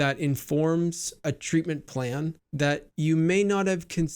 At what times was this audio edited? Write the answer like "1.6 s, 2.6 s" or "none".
1.2 s, 2.8 s